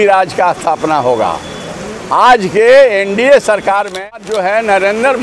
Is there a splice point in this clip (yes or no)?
yes